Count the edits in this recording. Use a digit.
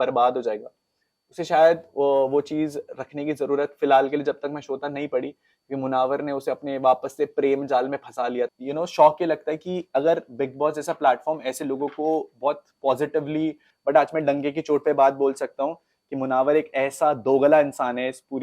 2